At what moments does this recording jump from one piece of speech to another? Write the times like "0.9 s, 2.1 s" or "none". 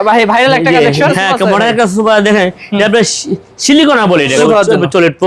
1.1 s, 4.4 s